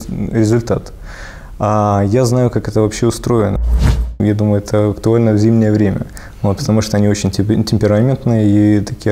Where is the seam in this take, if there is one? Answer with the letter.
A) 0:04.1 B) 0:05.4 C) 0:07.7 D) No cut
A